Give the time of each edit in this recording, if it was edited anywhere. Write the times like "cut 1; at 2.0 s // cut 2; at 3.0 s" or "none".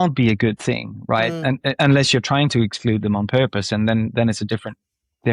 none

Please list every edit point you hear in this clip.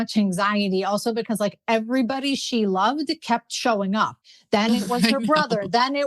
cut 1; at 4.2 s

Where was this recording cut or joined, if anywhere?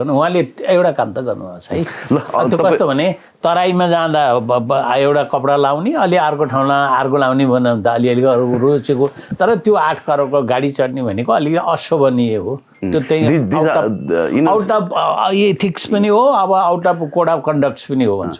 none

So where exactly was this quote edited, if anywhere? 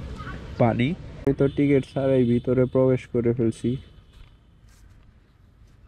cut 1; at 1.2 s

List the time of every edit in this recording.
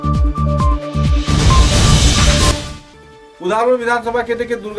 cut 1; at 2.5 s

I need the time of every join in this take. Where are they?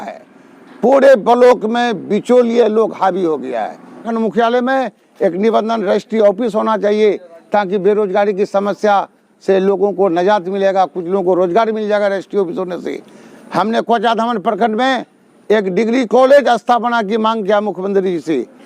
cut 1; at 4.0 s

